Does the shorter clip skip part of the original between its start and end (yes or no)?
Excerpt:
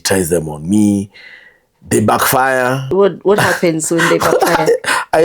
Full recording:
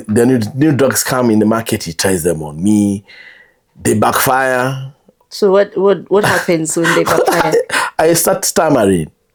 yes